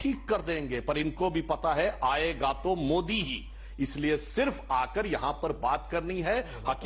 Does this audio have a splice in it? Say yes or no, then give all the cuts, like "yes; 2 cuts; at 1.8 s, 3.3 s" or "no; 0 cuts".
no; 0 cuts